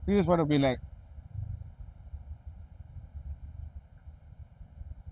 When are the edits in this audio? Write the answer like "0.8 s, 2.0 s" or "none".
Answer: none

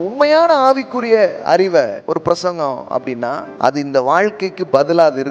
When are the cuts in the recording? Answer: 2.0 s, 3.5 s

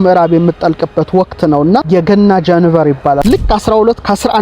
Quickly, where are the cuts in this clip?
1.8 s, 3.2 s

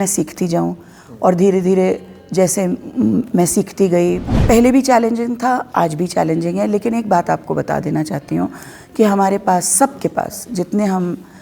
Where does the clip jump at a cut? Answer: 4.3 s

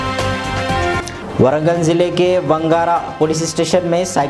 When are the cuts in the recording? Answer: 1.1 s

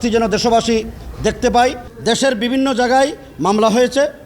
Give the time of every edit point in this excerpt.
1.9 s

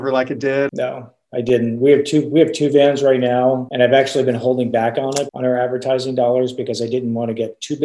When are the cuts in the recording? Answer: 5.3 s

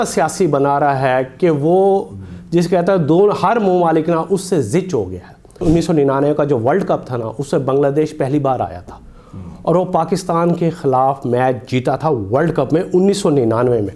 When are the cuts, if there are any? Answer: none

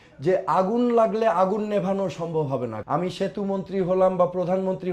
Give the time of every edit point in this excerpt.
2.7 s

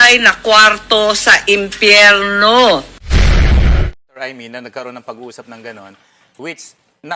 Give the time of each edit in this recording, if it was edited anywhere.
4.0 s

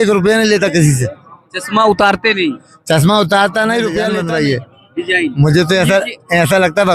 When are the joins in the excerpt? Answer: 4.1 s

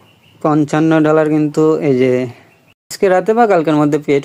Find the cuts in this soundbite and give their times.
none

